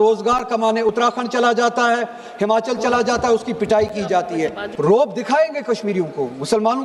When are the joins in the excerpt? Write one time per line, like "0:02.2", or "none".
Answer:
0:04.6